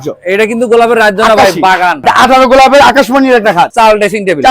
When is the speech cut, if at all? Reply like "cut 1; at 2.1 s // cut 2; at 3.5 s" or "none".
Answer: cut 1; at 2.0 s // cut 2; at 3.7 s